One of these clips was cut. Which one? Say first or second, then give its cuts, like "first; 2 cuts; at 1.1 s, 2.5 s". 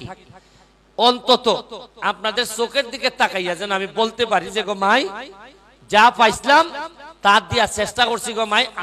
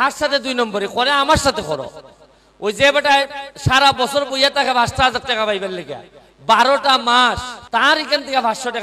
second; 1 cut; at 7.5 s